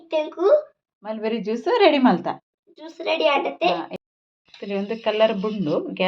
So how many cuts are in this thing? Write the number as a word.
one